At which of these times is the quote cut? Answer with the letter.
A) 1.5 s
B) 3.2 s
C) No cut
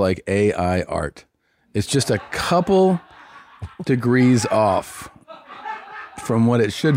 C